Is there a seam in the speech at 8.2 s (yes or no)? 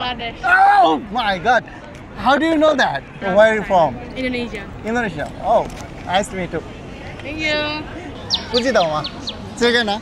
yes